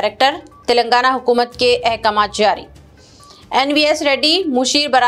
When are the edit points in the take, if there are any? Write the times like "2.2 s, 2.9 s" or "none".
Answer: none